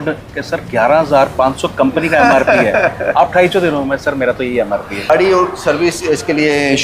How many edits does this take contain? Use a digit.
1